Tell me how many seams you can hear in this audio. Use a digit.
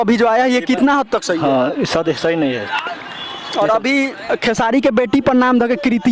0